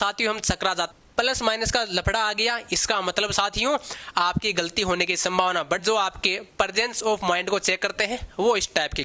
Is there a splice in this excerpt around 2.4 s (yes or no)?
no